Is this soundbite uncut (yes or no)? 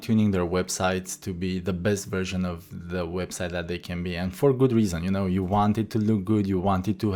yes